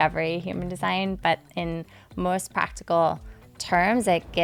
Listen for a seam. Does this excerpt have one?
no; 0 cuts

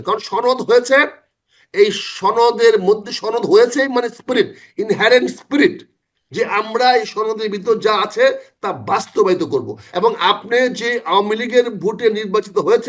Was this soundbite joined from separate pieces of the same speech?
yes; 1 cut; at 9.8 s

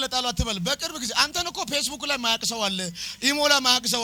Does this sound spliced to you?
no; 0 cuts

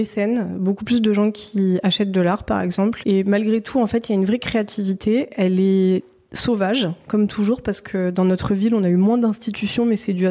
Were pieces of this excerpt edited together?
yes; 1 cut; at 3.0 s

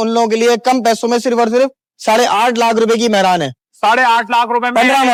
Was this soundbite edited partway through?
no; 0 cuts

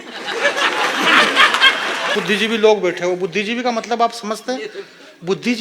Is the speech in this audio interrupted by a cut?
yes; 1 cut; at 2.2 s

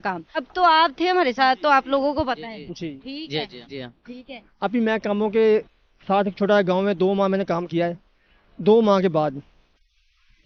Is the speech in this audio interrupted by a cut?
no; 0 cuts

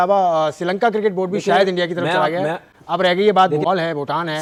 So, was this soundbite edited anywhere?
no; 0 cuts

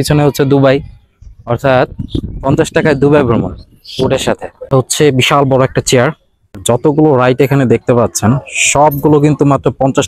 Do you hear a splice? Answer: yes; 2 cuts; at 4.7 s, 6.6 s

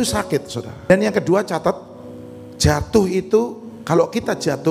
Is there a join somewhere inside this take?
yes; 1 cut; at 0.9 s

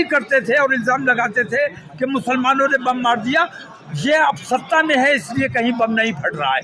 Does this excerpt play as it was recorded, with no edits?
yes; 0 cuts

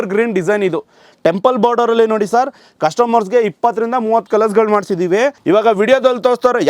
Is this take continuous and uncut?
no; 1 cut; at 5.4 s

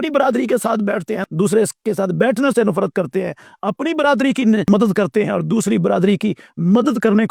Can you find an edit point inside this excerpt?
no; 0 cuts

